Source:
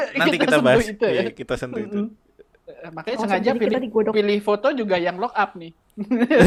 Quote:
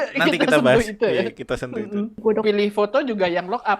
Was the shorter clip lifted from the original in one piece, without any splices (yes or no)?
no